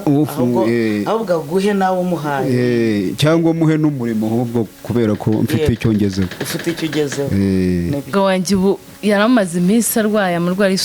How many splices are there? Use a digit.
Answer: 1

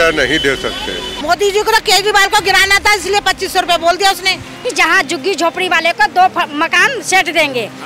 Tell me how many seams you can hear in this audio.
2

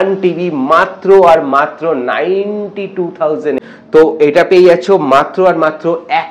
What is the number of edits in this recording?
1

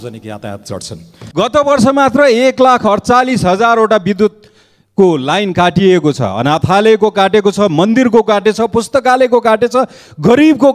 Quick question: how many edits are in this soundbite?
1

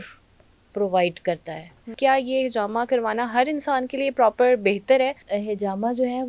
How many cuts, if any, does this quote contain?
2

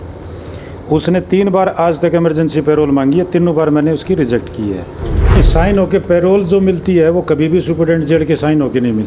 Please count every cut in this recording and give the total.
1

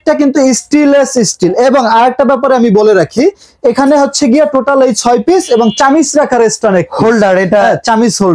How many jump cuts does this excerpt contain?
0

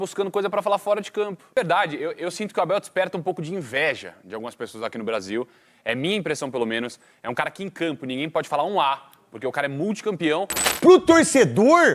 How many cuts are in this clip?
2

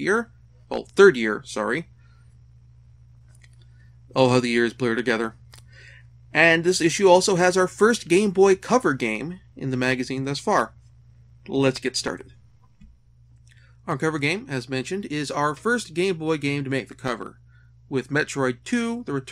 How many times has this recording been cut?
1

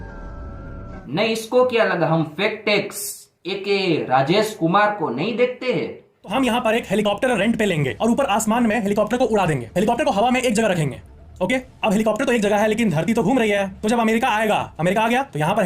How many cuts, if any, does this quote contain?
1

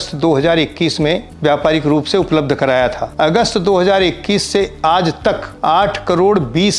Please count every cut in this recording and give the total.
3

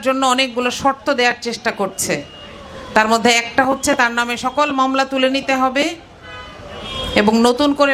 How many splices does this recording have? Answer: 0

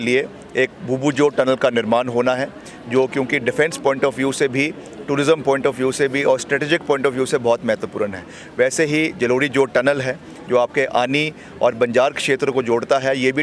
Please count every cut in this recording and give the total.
0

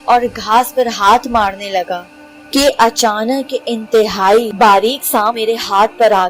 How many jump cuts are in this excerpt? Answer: 2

